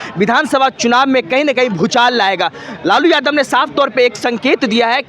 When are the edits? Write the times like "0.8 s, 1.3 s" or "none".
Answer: none